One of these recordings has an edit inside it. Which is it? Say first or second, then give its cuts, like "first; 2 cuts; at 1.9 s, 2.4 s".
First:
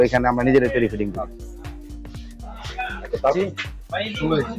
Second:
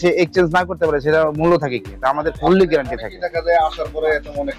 first; 1 cut; at 3.3 s